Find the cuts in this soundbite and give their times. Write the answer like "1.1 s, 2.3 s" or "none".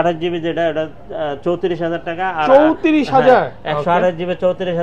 none